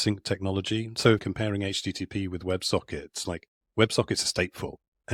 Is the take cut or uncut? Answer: cut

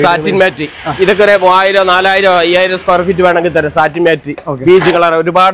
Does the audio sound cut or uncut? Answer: uncut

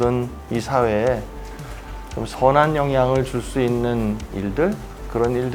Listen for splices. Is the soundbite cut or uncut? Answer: uncut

